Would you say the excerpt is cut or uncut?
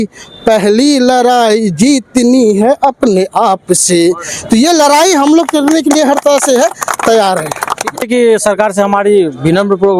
cut